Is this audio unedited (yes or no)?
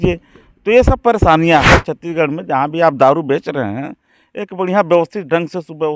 no